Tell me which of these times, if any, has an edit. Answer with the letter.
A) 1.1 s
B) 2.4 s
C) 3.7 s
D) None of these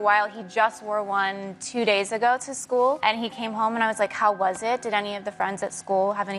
D